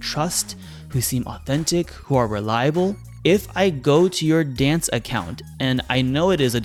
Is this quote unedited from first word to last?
yes; 0 cuts

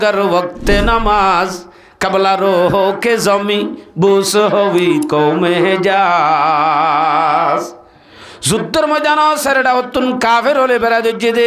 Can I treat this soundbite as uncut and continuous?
yes; 0 cuts

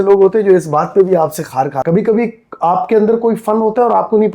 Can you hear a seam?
yes; 1 cut; at 1.8 s

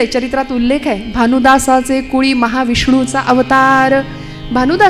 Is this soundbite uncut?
yes; 0 cuts

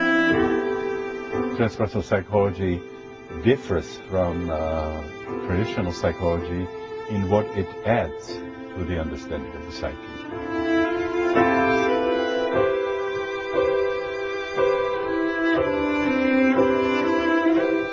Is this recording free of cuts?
yes; 0 cuts

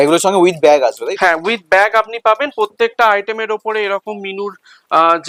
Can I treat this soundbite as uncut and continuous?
yes; 0 cuts

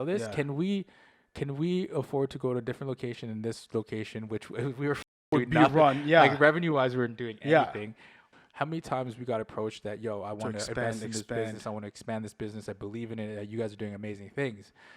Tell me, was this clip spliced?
yes; 1 cut; at 8.3 s

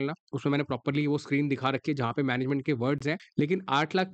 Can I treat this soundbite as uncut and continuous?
no; 1 cut; at 3.2 s

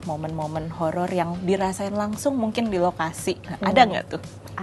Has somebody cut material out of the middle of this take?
no; 0 cuts

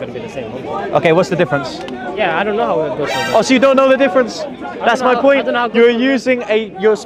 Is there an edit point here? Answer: no; 0 cuts

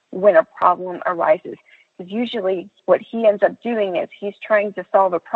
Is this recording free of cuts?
no; 1 cut; at 2.7 s

